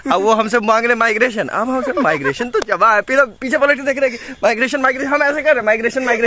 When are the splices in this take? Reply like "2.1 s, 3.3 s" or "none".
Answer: none